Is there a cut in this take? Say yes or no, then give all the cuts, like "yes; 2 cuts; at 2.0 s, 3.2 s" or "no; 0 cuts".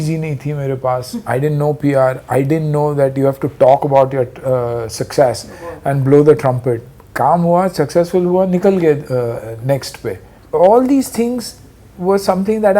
no; 0 cuts